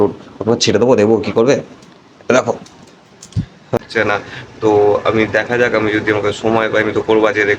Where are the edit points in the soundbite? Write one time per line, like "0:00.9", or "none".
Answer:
0:03.8